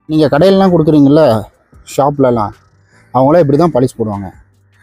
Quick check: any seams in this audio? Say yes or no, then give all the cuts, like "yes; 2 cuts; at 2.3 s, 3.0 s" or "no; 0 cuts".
no; 0 cuts